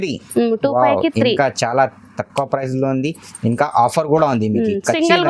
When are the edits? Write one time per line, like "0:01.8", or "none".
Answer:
none

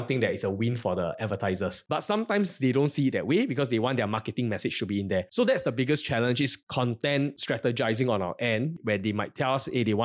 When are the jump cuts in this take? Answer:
0:01.8
0:05.3
0:06.6

